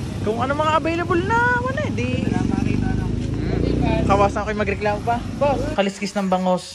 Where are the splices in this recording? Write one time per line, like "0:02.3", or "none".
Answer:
0:05.7